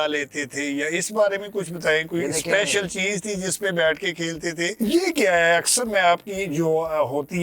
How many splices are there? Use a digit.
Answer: 1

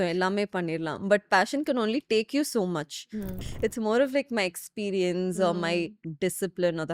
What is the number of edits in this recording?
1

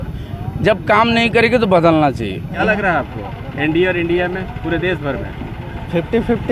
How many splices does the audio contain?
1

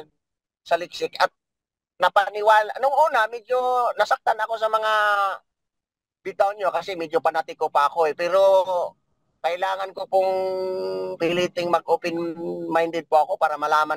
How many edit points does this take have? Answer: 0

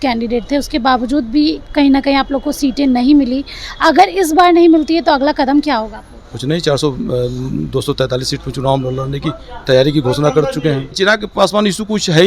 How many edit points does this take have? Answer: 1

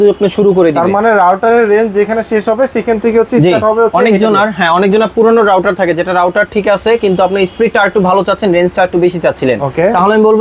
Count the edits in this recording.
0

